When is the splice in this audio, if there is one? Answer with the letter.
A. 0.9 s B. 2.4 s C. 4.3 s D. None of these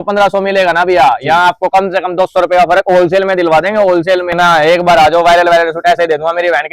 C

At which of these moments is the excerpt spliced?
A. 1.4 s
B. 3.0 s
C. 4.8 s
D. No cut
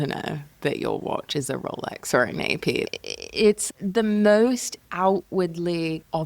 B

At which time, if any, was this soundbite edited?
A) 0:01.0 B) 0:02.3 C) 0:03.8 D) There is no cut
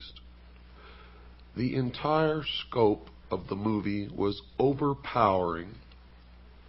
D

